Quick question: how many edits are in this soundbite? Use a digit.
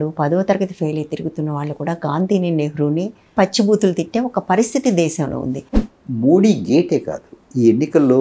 2